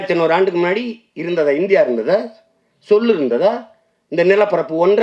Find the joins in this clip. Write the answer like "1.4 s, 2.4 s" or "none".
none